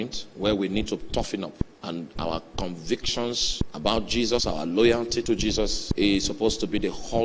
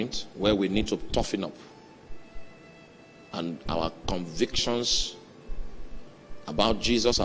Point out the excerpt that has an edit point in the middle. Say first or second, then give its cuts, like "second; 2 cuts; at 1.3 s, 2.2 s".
first; 3 cuts; at 1.7 s, 3.6 s, 5.8 s